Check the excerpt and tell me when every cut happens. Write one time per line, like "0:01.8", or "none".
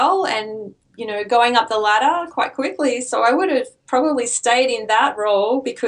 none